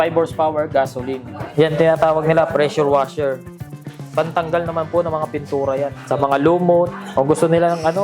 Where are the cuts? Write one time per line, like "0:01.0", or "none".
0:01.4
0:07.0